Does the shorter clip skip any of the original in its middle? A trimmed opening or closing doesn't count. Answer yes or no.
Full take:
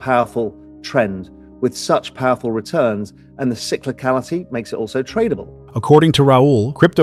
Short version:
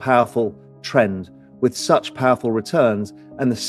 no